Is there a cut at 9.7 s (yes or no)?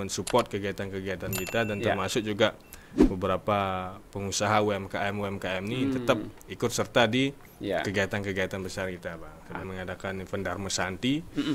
yes